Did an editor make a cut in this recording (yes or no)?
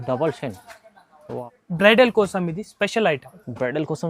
yes